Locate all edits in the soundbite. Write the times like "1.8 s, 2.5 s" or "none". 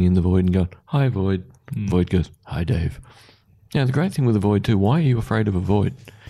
3.5 s